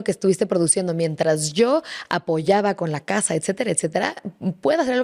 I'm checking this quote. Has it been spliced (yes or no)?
no